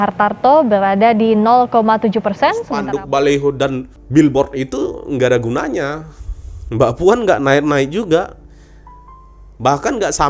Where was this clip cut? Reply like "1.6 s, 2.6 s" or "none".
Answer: 2.7 s, 3.9 s